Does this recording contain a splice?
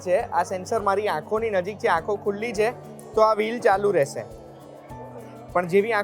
no; 0 cuts

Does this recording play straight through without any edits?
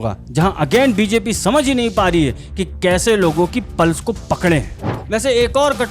no; 1 cut; at 4.8 s

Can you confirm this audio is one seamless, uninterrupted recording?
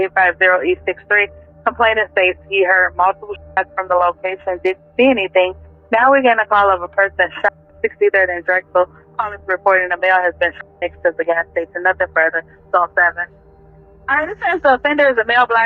yes; 0 cuts

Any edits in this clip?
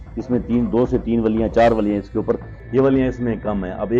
yes; 1 cut; at 2.5 s

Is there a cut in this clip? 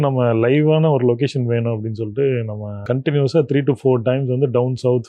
yes; 1 cut; at 2.8 s

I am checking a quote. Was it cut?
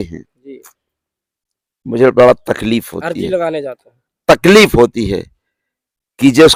no; 0 cuts

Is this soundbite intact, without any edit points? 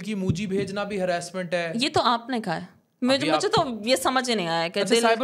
yes; 0 cuts

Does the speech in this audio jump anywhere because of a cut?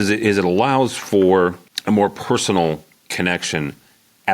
yes; 1 cut; at 1.7 s

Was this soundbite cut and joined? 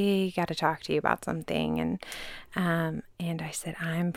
no; 0 cuts

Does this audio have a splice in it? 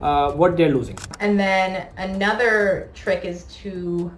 yes; 1 cut; at 1.1 s

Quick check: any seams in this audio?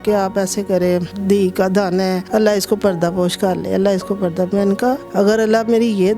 yes; 3 cuts; at 1.1 s, 2.2 s, 5.0 s

